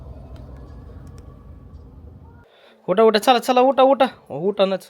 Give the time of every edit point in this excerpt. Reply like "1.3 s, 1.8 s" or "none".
2.4 s